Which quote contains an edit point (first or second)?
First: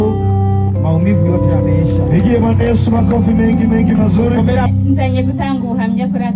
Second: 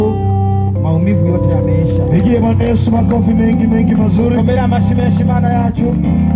first